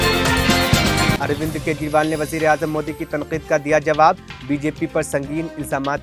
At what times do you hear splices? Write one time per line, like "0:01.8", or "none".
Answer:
0:01.2